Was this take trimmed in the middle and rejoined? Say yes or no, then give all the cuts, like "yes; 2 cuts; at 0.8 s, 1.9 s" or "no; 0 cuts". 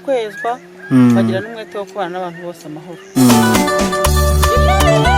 yes; 1 cut; at 3.5 s